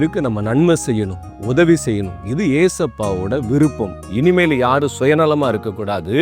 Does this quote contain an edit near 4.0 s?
yes; 1 cut; at 4.0 s

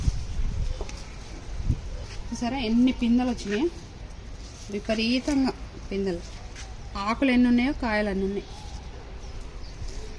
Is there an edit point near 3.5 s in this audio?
no; 1 cut; at 2.1 s

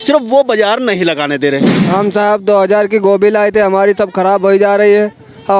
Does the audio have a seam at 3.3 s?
no; 1 cut; at 1.9 s

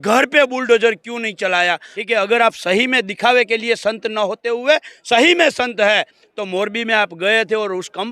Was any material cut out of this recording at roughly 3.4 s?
no; 1 cut; at 1.9 s

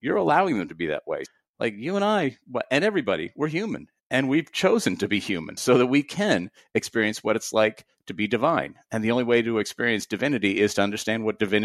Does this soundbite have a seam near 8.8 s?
no; 2 cuts; at 1.3 s, 5.4 s

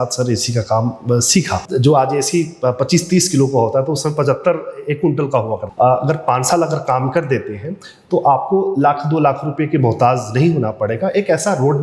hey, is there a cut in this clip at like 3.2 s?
no; 2 cuts; at 1.7 s, 5.6 s

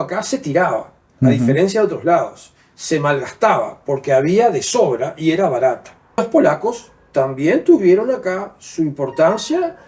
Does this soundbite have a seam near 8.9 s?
no; 1 cut; at 6.2 s

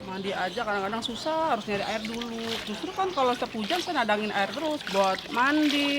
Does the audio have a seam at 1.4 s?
no; 1 cut; at 4.8 s

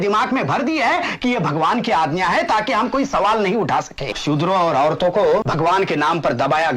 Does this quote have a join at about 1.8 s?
no; 2 cuts; at 4.2 s, 5.5 s

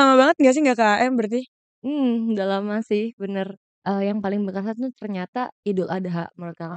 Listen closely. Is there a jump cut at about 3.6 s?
yes; 1 cut; at 3.6 s

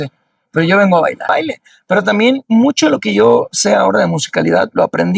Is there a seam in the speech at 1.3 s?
yes; 1 cut; at 1.3 s

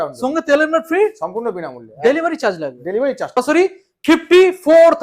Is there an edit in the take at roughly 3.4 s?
yes; 1 cut; at 3.4 s

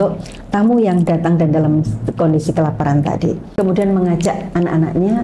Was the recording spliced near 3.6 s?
yes; 1 cut; at 3.6 s

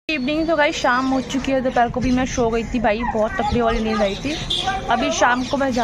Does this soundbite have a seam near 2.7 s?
no; 0 cuts

